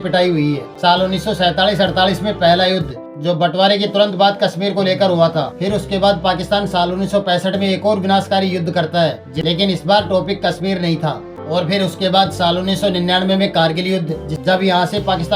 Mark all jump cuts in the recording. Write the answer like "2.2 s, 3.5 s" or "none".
9.3 s, 11.3 s, 14.3 s